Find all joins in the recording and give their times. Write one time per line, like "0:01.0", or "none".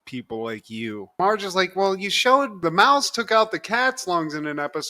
0:01.2

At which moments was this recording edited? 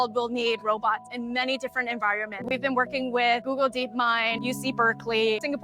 0:02.5
0:04.4

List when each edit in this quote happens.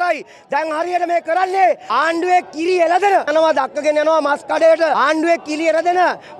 0:01.8
0:03.3
0:04.9

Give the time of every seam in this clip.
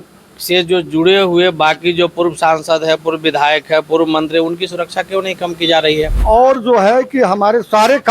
0:06.2

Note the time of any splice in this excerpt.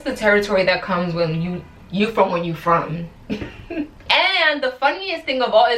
0:04.0

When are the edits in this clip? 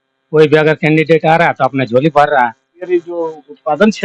0:02.9

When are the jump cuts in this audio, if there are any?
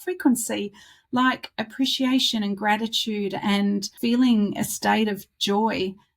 0:03.9

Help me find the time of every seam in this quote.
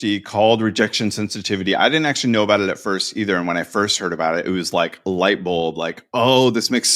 none

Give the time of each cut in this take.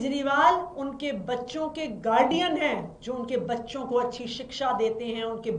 none

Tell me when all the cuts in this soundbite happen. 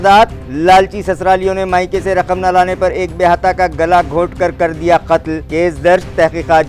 none

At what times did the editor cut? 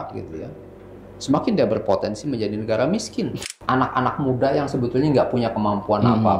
0:03.4

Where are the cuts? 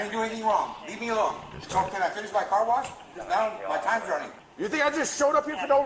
0:01.5
0:04.5

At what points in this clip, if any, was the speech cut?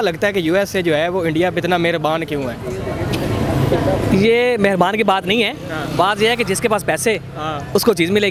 none

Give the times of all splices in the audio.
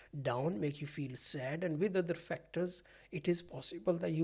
none

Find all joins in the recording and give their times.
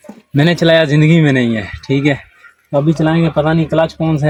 none

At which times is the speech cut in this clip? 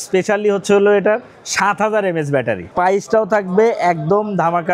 0:02.7

